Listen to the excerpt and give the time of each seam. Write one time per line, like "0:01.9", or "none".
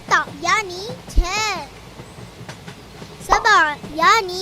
0:01.7
0:03.3

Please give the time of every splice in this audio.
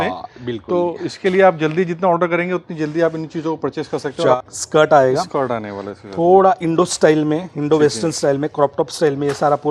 0:04.3

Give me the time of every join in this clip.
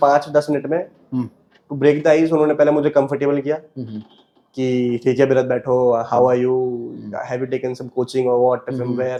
none

